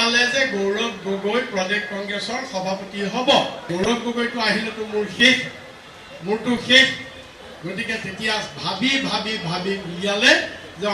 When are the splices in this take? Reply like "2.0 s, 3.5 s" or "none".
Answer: 3.6 s

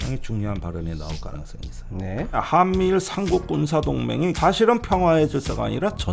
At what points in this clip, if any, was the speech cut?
2.4 s, 4.4 s

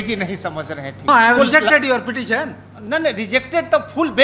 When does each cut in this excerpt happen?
1.1 s

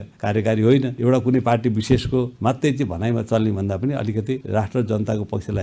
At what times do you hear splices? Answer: 1.0 s

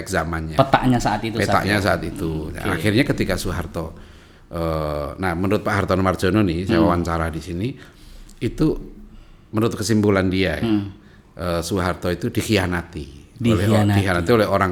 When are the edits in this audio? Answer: none

